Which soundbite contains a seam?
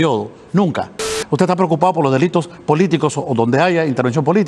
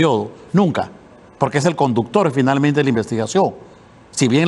first; 1 cut; at 1.2 s

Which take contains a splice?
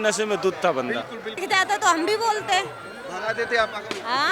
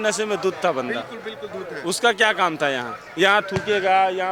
first; 1 cut; at 1.4 s

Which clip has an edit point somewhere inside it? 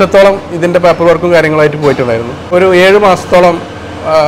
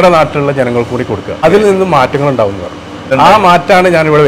second; 2 cuts; at 1.4 s, 3.1 s

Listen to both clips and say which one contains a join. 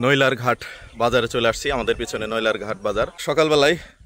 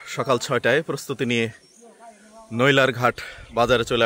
first; 1 cut; at 3.2 s

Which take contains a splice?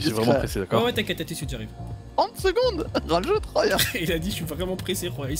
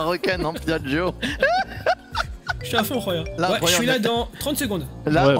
second; 2 cuts; at 1.2 s, 3.4 s

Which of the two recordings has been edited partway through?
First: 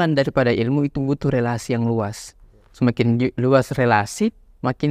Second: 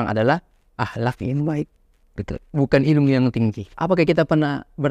second; 1 cut; at 3.7 s

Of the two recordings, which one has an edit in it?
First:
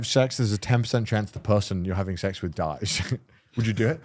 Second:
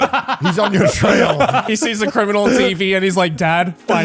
second; 1 cut; at 1.7 s

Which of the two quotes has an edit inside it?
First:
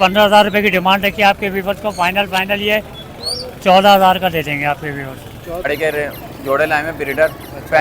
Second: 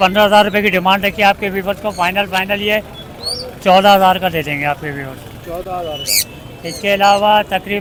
first; 1 cut; at 5.7 s

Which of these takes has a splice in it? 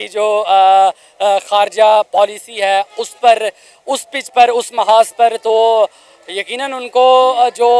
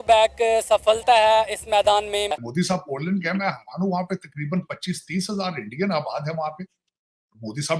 second; 1 cut; at 2.4 s

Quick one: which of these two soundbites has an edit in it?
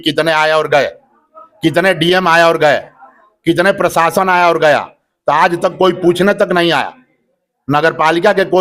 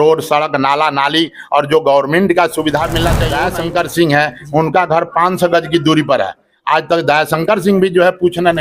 second; 1 cut; at 3.3 s

